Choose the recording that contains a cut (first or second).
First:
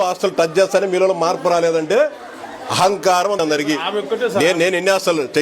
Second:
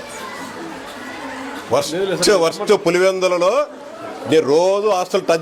first